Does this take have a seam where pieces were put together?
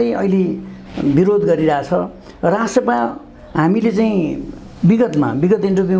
no; 0 cuts

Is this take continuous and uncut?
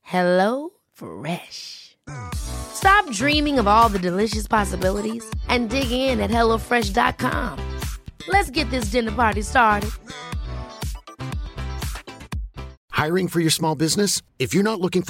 no; 1 cut; at 12.8 s

